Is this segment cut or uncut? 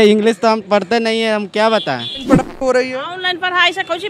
cut